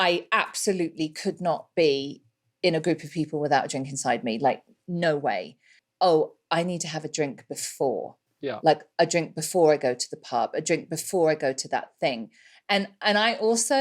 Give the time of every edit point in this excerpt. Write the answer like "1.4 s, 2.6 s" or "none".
5.8 s

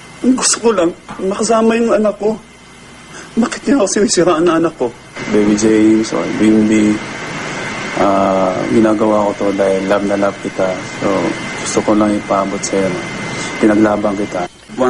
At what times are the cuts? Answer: none

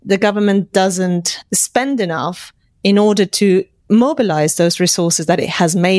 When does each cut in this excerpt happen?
none

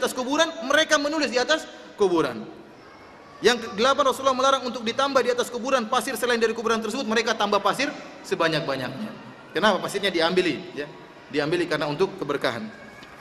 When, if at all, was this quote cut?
5.5 s

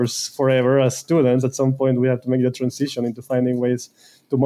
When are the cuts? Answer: none

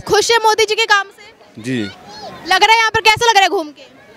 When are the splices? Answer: none

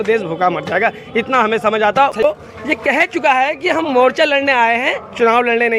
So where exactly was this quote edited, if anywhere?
2.2 s

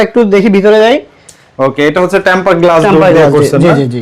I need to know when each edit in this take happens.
none

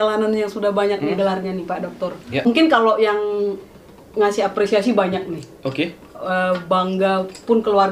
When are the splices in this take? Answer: 2.5 s

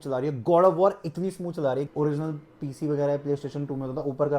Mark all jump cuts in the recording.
1.9 s

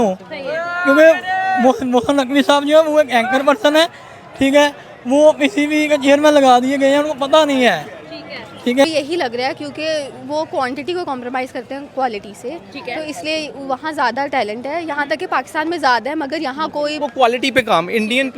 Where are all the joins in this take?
8.8 s, 17.0 s

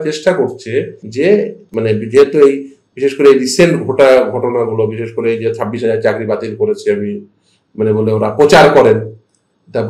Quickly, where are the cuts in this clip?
1.0 s, 1.6 s

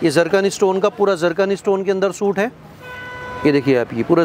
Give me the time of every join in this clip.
none

